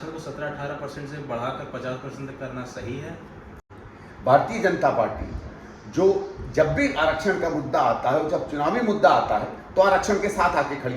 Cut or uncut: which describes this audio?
cut